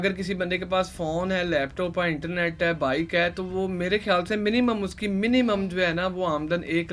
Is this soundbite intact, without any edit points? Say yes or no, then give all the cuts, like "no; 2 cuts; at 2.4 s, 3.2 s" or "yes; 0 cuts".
yes; 0 cuts